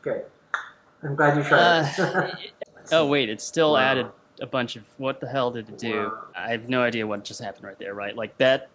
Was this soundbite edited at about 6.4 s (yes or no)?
yes